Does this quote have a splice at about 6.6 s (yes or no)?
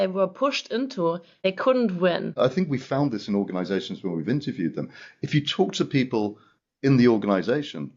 no